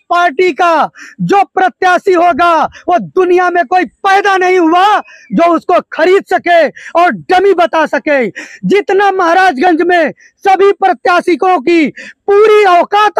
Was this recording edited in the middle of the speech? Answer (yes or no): no